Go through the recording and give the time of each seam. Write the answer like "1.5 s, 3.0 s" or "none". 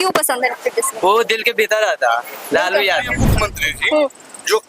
3.2 s